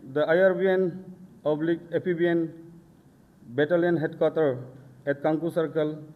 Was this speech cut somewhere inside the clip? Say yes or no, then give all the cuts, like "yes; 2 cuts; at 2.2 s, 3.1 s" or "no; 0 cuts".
no; 0 cuts